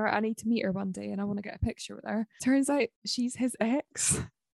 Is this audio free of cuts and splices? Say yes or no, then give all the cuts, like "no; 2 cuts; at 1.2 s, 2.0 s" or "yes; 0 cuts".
no; 2 cuts; at 2.3 s, 3.0 s